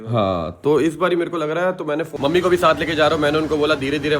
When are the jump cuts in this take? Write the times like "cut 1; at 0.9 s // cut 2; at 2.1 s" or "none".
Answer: cut 1; at 2.1 s